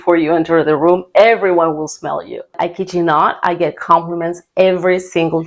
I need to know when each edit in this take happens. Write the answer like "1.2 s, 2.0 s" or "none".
2.5 s